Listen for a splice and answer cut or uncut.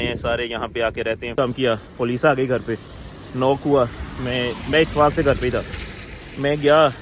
cut